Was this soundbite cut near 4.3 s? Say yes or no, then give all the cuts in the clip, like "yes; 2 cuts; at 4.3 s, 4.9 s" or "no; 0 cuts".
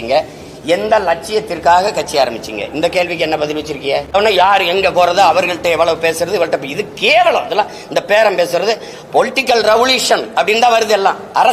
yes; 1 cut; at 4.3 s